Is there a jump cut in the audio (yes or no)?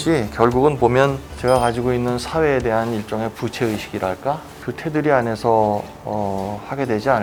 no